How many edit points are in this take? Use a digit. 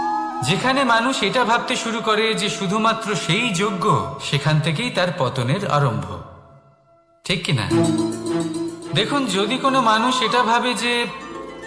0